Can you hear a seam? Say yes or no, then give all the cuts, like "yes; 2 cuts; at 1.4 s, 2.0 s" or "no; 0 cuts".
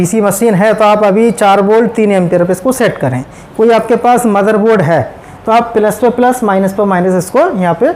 no; 0 cuts